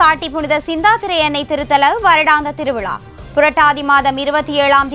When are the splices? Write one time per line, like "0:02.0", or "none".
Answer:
none